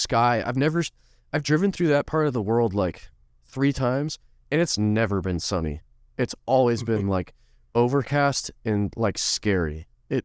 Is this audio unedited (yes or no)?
yes